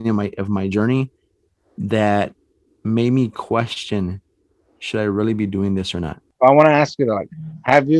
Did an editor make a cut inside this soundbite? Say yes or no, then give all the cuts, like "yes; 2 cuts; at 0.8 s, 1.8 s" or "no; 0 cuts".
yes; 1 cut; at 6.2 s